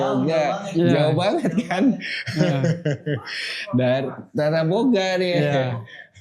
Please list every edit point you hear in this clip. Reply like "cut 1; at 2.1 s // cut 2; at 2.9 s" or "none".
none